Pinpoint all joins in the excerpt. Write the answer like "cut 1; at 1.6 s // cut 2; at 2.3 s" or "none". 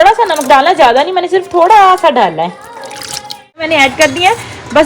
cut 1; at 3.6 s